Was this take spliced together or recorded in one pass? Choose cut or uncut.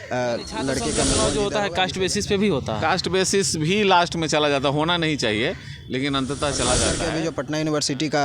cut